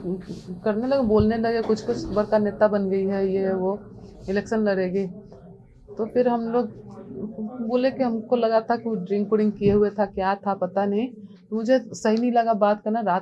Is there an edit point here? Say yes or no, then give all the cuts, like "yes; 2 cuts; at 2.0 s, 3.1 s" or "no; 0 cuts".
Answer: no; 0 cuts